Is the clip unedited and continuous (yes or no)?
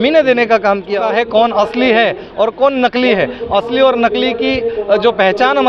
no